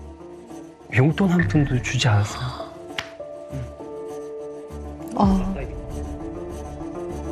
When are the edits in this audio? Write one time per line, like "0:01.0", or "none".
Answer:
none